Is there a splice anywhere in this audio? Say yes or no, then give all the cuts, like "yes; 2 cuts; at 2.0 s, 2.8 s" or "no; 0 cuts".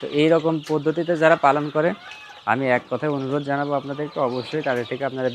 no; 0 cuts